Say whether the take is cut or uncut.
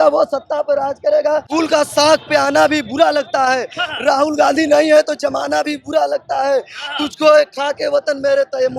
cut